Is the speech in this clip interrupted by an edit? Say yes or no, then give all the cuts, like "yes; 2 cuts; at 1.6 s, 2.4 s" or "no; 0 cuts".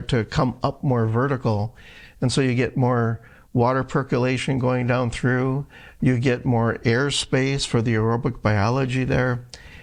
no; 0 cuts